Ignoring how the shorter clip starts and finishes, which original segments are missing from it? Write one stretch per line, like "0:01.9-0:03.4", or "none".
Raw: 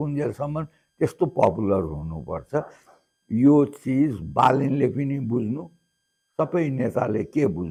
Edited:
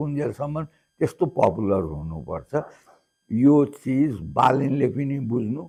none

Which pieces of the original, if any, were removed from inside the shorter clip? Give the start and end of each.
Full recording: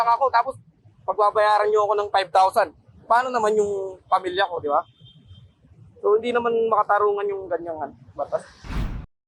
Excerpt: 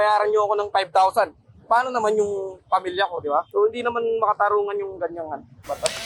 0:04.9-0:06.0

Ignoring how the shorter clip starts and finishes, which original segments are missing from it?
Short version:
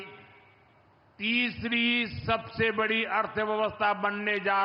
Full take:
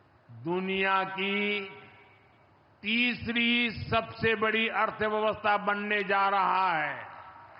none

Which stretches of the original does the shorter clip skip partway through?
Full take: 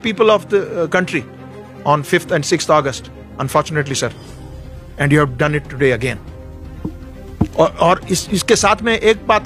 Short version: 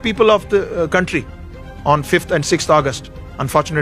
none

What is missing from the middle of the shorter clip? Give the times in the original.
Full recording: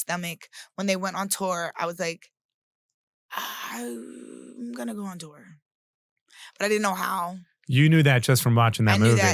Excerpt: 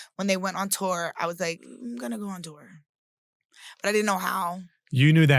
0:02.3-0:04.4

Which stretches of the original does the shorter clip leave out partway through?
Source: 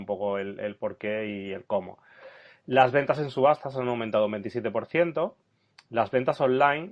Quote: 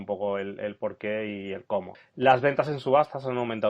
0:02.0-0:02.5

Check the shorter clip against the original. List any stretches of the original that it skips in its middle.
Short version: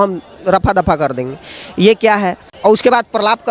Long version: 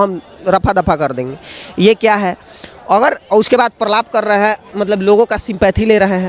0:02.5-0:03.2

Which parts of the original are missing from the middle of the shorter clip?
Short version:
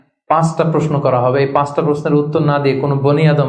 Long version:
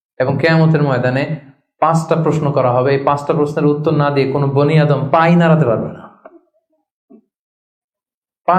none

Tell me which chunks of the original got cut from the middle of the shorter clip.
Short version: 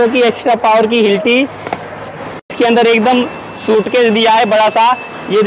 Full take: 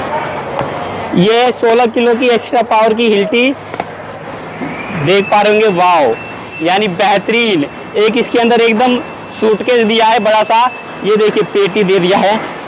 0:04.6-0:08.3

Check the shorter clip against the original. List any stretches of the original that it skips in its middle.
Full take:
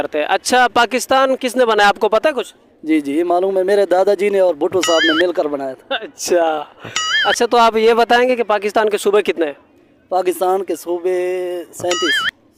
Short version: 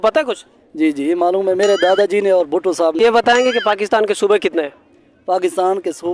0:05.1-0:07.8

